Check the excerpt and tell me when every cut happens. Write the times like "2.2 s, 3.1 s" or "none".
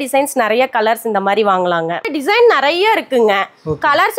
2.1 s

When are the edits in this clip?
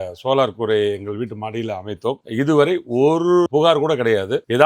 2.2 s

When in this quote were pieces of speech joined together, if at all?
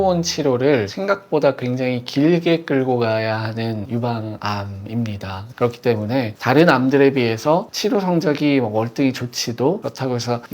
5.4 s

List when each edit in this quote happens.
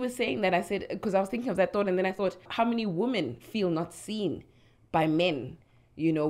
2.4 s

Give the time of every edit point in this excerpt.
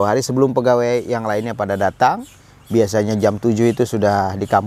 none

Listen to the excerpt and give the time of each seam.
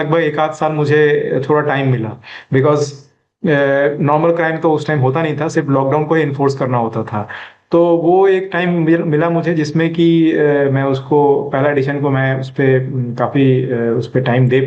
none

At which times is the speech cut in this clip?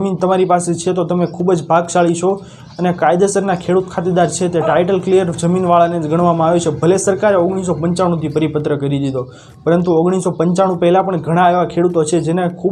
none

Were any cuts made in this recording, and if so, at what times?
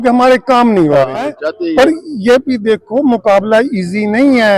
1.4 s

